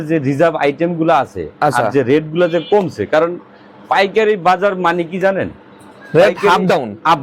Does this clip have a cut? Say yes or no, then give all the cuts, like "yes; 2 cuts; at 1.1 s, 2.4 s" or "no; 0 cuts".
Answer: no; 0 cuts